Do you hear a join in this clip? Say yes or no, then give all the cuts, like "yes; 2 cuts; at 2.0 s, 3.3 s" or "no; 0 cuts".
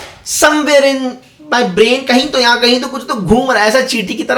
no; 0 cuts